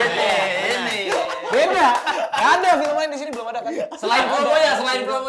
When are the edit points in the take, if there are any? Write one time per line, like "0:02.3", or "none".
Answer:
none